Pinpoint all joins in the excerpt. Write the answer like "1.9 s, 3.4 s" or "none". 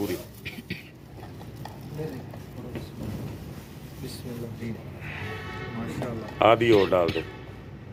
none

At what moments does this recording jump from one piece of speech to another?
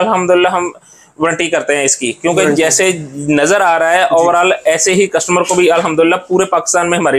none

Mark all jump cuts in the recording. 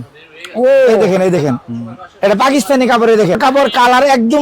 3.4 s

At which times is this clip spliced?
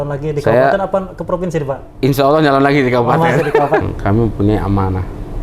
3.9 s

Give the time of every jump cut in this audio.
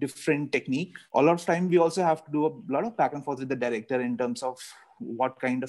1.0 s

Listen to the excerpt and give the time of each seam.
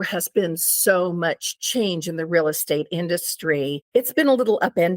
3.8 s

